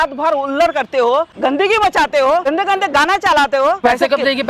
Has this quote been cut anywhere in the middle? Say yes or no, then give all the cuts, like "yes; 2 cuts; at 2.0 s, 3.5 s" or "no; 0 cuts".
yes; 3 cuts; at 1.3 s, 2.5 s, 3.8 s